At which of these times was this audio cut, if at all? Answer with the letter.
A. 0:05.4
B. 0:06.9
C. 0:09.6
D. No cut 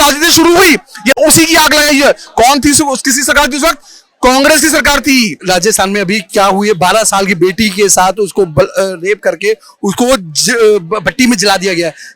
A